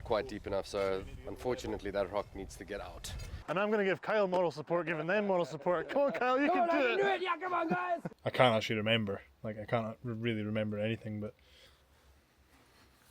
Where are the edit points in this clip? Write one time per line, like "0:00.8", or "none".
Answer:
0:03.4
0:08.1
0:11.4